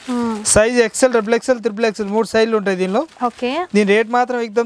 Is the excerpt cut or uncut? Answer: uncut